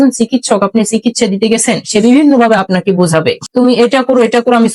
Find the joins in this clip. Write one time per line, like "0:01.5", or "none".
0:03.6